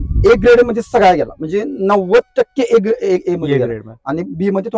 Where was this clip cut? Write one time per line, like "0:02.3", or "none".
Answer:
none